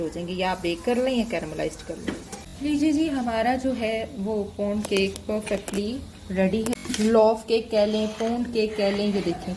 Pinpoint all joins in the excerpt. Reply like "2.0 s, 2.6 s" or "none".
2.3 s, 6.7 s